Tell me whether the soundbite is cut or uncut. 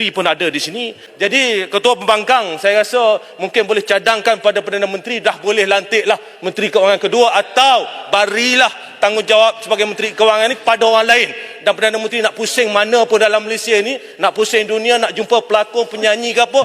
cut